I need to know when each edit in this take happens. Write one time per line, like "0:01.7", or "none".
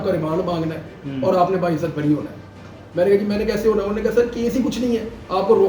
none